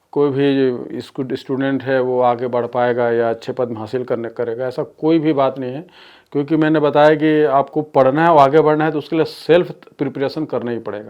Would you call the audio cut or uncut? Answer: uncut